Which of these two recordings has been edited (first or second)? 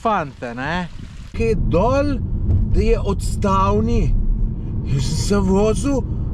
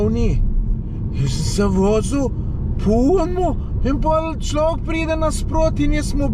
first